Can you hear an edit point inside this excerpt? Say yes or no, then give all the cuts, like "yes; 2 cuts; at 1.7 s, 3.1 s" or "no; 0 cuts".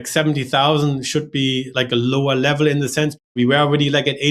yes; 2 cuts; at 1.7 s, 3.2 s